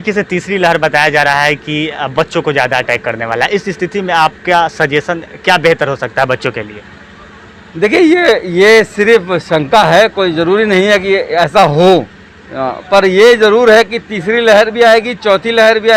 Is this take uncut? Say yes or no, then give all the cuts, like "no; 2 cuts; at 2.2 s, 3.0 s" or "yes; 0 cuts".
yes; 0 cuts